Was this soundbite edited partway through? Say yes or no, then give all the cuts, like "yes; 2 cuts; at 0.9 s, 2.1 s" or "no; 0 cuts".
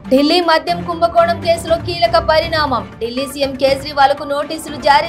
no; 0 cuts